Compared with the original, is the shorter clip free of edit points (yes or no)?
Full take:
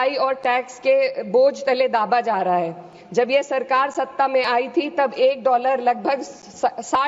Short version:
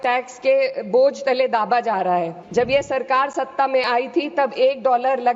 no